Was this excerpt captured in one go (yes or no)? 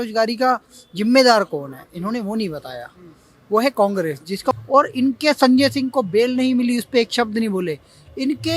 no